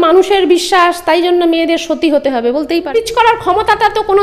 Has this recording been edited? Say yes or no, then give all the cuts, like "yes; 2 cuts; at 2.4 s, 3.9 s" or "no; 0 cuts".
yes; 1 cut; at 2.9 s